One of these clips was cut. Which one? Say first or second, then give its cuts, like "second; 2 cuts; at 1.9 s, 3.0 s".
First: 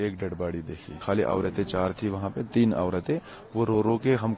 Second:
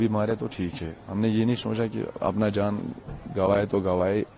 first; 1 cut; at 0.9 s